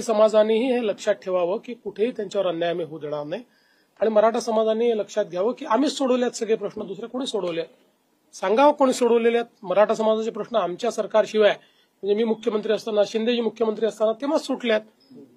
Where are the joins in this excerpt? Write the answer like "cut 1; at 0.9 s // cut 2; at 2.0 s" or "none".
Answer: none